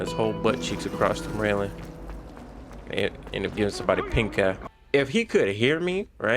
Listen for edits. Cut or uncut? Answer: cut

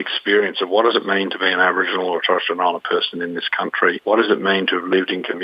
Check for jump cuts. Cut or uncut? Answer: uncut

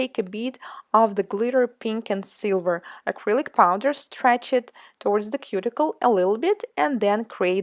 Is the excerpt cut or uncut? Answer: uncut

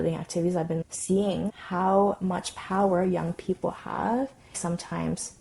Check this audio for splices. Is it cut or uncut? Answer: cut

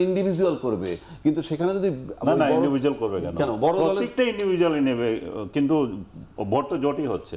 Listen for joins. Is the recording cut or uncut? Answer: uncut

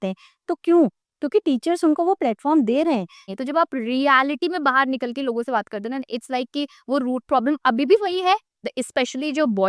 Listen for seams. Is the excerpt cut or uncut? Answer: cut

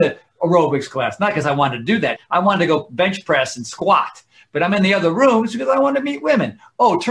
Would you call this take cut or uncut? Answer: cut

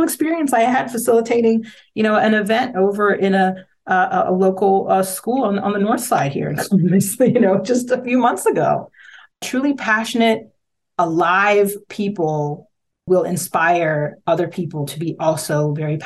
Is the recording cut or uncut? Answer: uncut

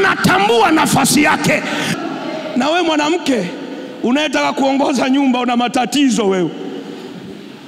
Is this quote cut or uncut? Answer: cut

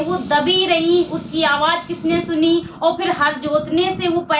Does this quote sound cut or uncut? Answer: uncut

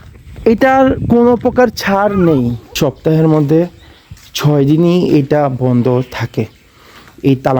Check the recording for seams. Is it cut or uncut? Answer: cut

